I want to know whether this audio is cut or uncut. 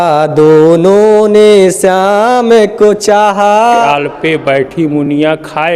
cut